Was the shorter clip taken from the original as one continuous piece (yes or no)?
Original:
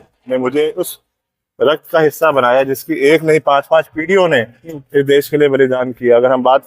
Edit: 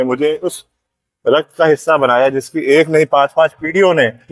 yes